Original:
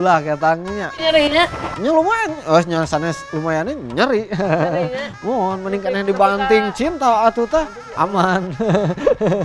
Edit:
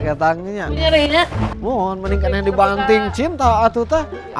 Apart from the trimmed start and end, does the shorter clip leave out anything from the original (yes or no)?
yes